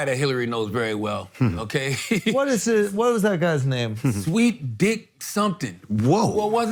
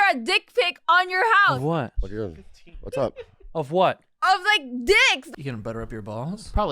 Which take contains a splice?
second; 1 cut; at 5.2 s

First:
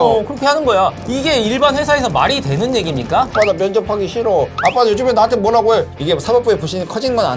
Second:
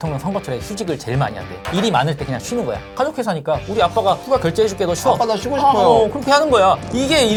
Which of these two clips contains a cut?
first; 1 cut; at 5.9 s

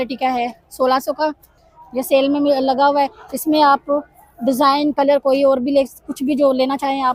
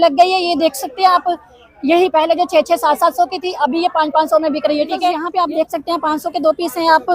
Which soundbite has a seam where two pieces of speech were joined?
second; 1 cut; at 5.2 s

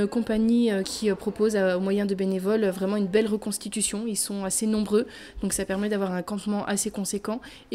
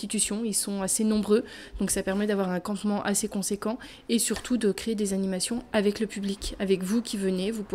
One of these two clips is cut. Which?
first; 1 cut; at 0.9 s

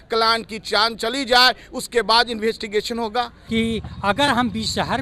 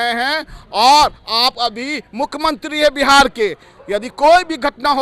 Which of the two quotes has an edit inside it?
first; 1 cut; at 3.4 s

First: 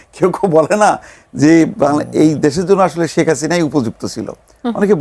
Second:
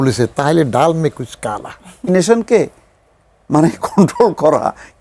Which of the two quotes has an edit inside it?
second; 1 cut; at 2.1 s

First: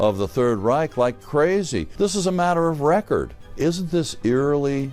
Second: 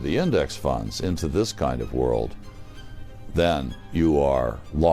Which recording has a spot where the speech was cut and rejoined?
first; 2 cuts; at 1.9 s, 3.4 s

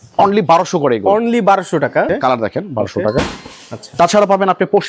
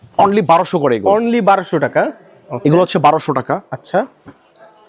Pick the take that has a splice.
first; 1 cut; at 2.1 s

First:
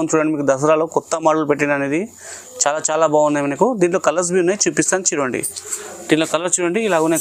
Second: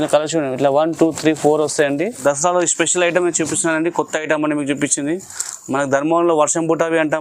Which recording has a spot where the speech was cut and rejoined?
second; 1 cut; at 2.2 s

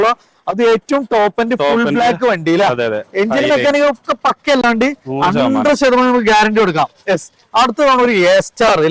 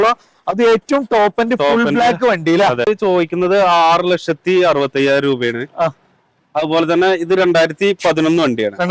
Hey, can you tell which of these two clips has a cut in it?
second; 1 cut; at 2.9 s

